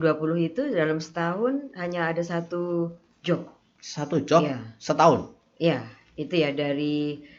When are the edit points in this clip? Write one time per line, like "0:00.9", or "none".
none